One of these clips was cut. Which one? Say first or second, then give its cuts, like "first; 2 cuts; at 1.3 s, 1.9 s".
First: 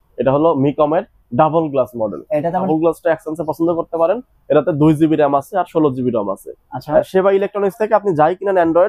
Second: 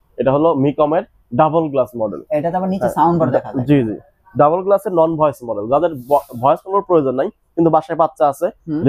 first; 2 cuts; at 2.7 s, 7.1 s